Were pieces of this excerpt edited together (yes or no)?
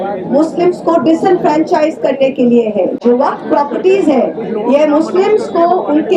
no